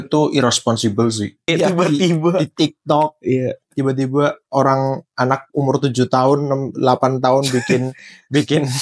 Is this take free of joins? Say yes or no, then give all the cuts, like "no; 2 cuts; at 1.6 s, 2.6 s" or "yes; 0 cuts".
no; 1 cut; at 1.5 s